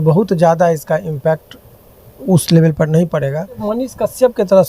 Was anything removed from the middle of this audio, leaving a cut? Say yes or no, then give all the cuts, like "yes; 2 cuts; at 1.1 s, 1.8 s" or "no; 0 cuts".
yes; 1 cut; at 3.6 s